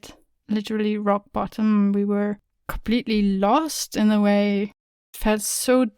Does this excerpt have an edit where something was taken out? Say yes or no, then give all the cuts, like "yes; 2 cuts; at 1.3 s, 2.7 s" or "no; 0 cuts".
yes; 1 cut; at 5.0 s